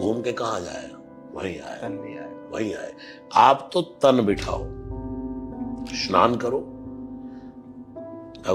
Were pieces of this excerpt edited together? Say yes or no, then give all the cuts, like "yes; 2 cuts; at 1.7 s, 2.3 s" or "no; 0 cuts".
no; 0 cuts